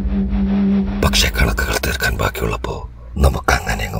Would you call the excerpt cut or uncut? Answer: cut